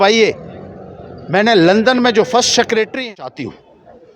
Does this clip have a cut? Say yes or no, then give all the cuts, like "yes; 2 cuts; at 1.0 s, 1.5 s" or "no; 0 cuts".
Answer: yes; 1 cut; at 3.0 s